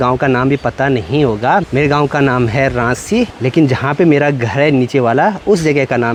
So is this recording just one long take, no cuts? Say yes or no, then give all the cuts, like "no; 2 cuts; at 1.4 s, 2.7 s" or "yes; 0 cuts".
yes; 0 cuts